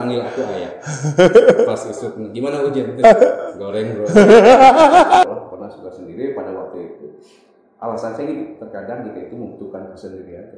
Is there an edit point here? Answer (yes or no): yes